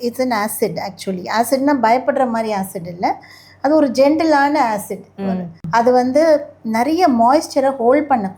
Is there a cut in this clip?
yes; 1 cut; at 5.5 s

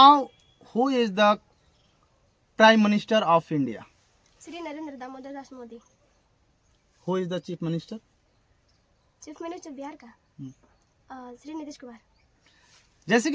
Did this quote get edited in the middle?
no; 0 cuts

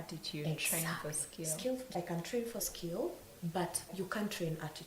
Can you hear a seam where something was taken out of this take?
no; 0 cuts

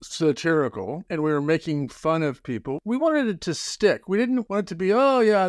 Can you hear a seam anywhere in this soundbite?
yes; 3 cuts; at 1.0 s, 2.7 s, 4.5 s

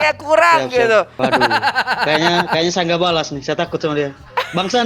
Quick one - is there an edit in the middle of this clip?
yes; 1 cut; at 1.1 s

